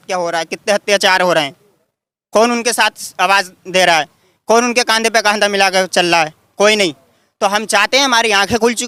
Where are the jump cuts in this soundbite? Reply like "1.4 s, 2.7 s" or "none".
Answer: none